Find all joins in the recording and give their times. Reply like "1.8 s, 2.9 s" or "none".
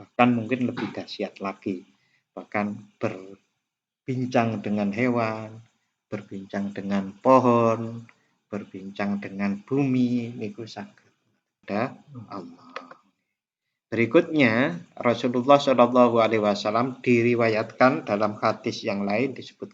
11.6 s